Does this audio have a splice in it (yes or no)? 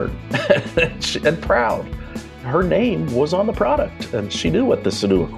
yes